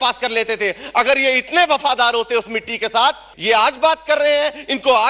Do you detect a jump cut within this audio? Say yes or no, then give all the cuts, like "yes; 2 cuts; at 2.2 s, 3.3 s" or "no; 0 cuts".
yes; 1 cut; at 3.3 s